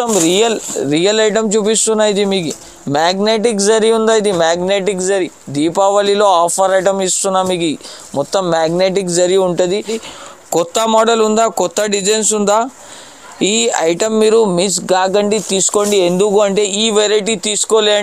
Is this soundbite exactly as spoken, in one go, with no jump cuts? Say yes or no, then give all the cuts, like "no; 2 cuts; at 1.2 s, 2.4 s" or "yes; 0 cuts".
no; 1 cut; at 10.0 s